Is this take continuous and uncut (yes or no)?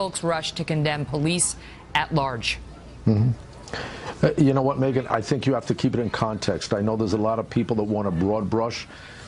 yes